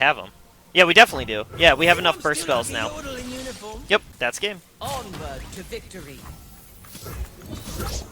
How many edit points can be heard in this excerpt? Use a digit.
1